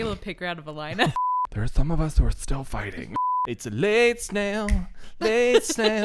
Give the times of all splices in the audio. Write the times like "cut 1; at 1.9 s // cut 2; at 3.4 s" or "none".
cut 1; at 1.1 s // cut 2; at 3.1 s